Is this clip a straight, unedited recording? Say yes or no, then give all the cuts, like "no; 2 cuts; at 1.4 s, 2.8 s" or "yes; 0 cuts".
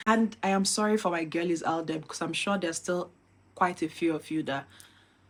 yes; 0 cuts